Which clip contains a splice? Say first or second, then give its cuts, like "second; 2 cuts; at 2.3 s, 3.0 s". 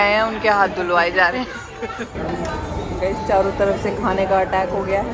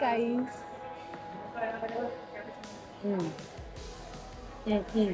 first; 1 cut; at 2.1 s